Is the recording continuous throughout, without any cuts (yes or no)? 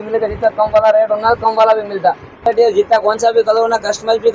no